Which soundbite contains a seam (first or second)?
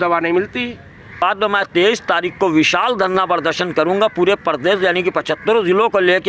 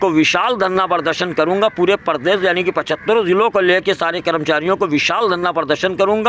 first